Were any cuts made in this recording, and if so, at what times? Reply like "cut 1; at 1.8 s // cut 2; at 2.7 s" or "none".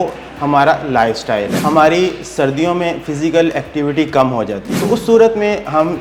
cut 1; at 1.5 s // cut 2; at 4.7 s